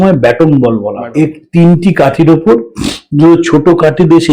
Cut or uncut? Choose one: cut